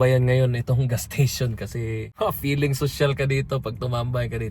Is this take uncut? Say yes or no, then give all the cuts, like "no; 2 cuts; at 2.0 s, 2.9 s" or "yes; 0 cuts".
no; 1 cut; at 2.1 s